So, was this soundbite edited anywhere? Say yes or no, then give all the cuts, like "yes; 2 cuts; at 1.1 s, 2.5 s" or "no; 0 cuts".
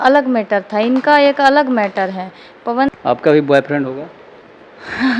yes; 1 cut; at 3.0 s